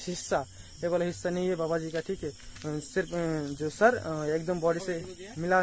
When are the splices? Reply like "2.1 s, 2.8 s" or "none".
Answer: none